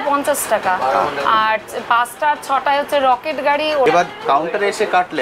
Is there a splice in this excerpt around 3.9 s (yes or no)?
yes